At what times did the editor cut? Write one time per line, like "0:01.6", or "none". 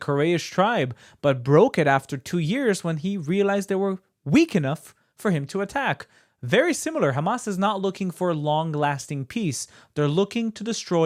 none